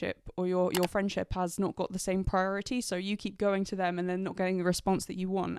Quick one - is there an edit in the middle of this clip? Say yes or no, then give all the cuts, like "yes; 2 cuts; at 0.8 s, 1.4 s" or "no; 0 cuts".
no; 0 cuts